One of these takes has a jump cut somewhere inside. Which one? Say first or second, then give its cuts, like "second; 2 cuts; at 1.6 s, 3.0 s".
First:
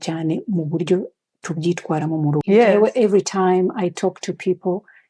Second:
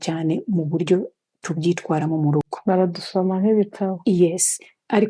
first; 1 cut; at 2.5 s